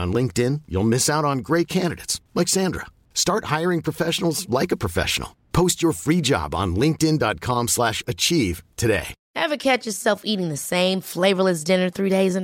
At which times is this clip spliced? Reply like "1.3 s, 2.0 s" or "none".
9.2 s